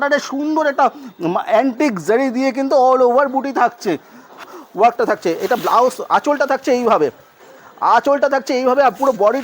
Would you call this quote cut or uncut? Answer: cut